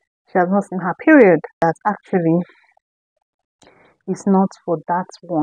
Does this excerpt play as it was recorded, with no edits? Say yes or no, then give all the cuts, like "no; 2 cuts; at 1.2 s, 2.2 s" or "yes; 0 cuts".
no; 1 cut; at 1.6 s